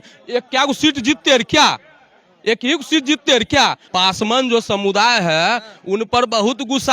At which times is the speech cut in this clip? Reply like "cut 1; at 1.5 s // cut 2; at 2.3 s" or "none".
cut 1; at 3.8 s